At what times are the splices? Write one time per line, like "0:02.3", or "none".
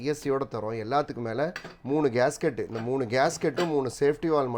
none